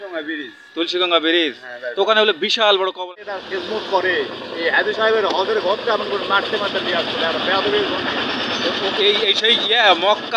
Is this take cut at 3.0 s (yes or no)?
yes